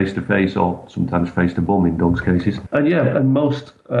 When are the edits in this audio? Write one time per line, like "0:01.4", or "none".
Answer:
0:02.6